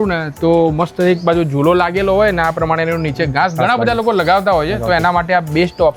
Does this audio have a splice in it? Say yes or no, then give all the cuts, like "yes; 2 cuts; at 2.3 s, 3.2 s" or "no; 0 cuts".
no; 0 cuts